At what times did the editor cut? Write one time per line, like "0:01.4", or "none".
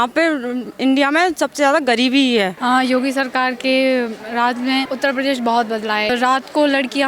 0:02.5
0:04.9
0:06.1